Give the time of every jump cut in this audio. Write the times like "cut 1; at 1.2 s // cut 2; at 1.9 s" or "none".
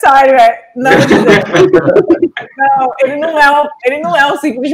none